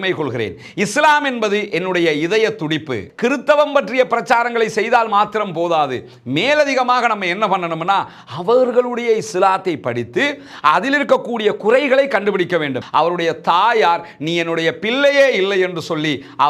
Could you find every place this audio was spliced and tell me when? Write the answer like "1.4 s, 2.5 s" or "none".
3.0 s, 12.8 s